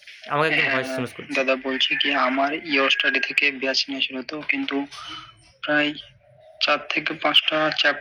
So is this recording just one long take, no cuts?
yes; 0 cuts

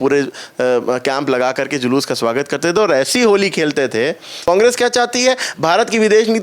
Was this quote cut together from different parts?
yes; 1 cut; at 4.4 s

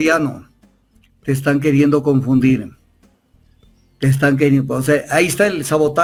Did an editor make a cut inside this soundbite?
no; 0 cuts

